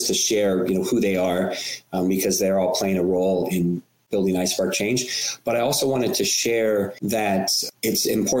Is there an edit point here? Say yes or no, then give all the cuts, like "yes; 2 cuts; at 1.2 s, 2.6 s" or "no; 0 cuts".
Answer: yes; 1 cut; at 7.4 s